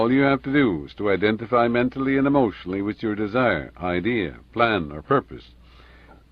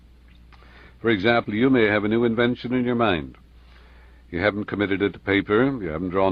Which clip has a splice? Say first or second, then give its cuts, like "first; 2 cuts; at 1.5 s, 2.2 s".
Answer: first; 1 cut; at 1.8 s